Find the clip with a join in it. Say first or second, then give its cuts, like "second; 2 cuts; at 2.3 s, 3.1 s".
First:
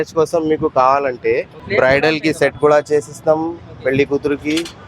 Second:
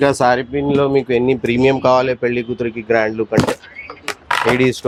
first; 1 cut; at 1.6 s